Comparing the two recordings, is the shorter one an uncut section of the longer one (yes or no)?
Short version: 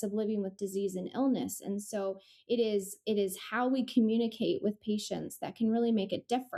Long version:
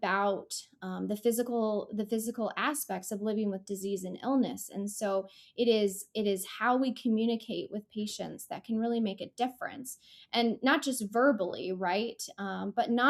yes